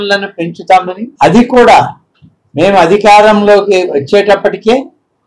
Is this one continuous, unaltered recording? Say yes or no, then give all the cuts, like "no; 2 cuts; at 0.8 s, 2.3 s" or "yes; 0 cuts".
no; 1 cut; at 1.1 s